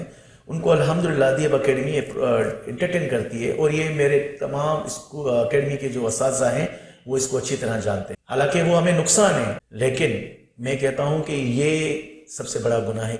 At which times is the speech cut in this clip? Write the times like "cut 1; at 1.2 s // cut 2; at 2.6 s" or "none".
cut 1; at 8.2 s // cut 2; at 9.6 s